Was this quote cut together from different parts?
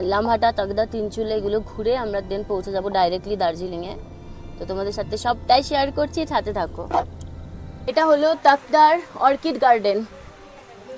no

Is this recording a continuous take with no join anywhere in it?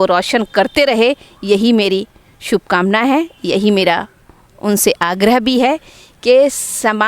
yes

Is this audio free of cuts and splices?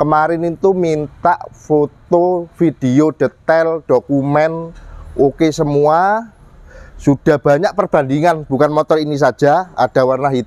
yes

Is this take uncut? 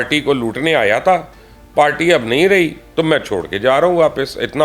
yes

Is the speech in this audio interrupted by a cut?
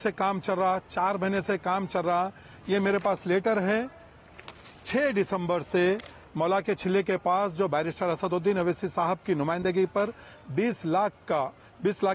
no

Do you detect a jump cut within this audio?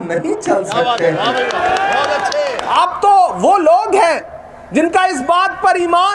no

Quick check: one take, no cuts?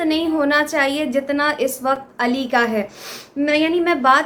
yes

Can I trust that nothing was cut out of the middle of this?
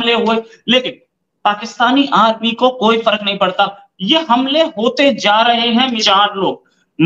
no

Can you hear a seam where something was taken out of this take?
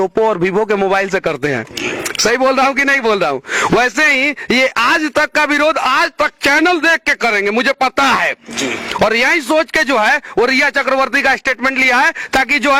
no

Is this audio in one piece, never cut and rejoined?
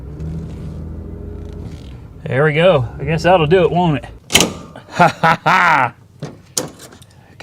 no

